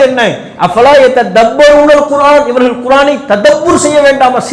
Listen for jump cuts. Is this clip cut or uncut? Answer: uncut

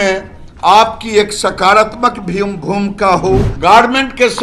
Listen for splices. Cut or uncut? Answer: cut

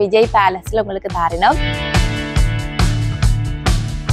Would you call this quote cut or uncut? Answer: cut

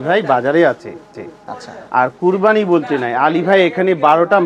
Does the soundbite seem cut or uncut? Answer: uncut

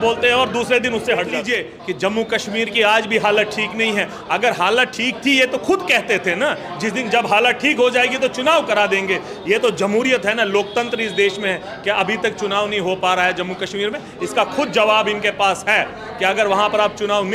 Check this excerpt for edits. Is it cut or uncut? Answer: cut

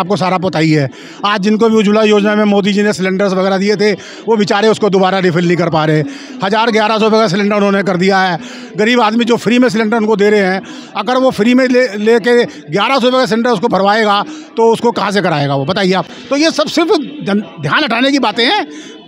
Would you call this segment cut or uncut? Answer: uncut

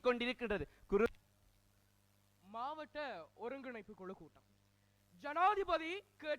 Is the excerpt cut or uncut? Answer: cut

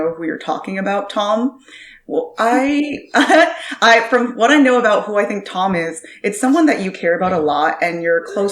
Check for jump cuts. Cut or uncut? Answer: uncut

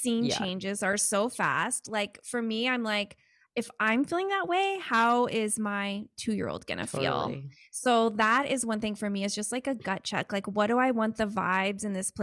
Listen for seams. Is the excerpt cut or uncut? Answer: uncut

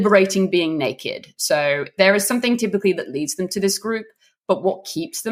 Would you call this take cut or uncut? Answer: uncut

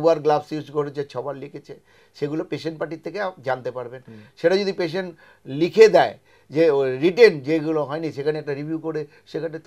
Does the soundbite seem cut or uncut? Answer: uncut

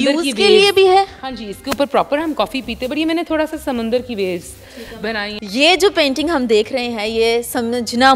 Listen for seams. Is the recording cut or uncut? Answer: cut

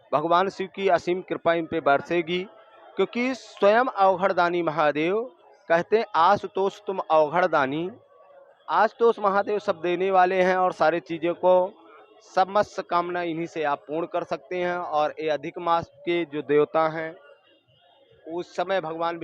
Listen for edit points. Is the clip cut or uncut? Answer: uncut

